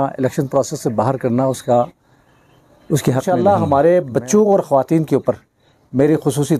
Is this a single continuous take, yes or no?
no